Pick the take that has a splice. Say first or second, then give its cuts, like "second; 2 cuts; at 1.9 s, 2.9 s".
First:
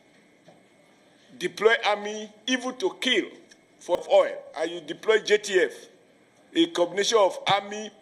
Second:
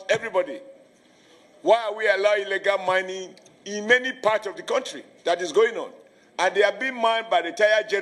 first; 1 cut; at 4.0 s